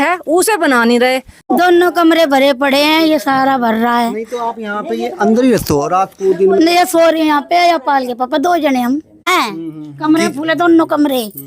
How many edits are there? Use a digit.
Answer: 2